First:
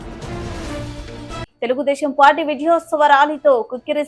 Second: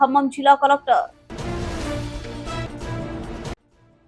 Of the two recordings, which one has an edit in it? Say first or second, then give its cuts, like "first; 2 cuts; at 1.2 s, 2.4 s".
first; 1 cut; at 1.5 s